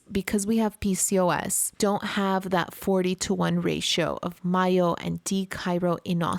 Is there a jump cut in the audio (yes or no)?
no